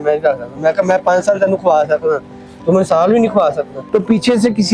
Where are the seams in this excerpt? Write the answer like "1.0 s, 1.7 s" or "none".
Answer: 3.7 s